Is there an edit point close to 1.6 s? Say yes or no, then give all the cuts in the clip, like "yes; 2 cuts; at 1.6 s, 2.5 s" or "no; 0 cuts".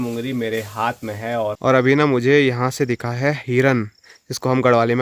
yes; 1 cut; at 1.6 s